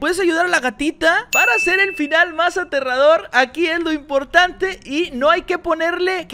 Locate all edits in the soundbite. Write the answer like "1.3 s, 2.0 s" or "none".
none